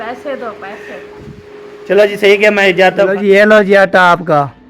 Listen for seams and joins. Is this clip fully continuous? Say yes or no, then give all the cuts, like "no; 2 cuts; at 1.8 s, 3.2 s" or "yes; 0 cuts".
no; 1 cut; at 3.1 s